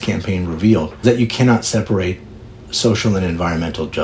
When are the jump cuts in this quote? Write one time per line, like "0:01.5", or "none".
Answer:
0:01.0
0:02.6